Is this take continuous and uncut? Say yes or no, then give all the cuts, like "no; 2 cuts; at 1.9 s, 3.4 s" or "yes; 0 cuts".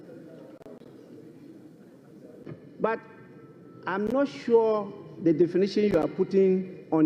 no; 1 cut; at 2.4 s